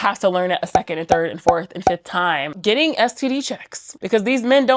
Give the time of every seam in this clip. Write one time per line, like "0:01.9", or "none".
0:02.5